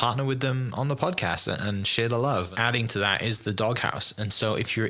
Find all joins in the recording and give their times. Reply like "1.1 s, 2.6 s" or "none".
2.5 s